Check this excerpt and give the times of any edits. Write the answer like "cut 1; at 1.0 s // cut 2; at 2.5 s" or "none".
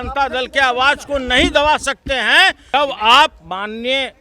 cut 1; at 2.6 s